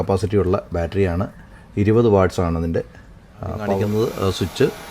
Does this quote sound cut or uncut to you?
cut